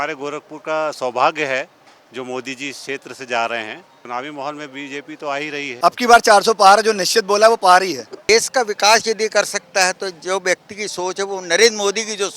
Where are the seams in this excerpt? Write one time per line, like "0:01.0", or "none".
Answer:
0:04.0
0:05.7
0:08.3